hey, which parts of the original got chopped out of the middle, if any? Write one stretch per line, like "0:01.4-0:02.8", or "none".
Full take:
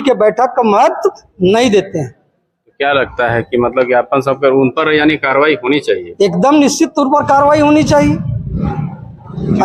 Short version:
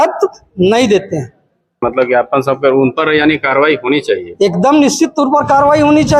0:02.7-0:03.6